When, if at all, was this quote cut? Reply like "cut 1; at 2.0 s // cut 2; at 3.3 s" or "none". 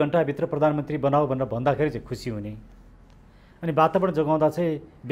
none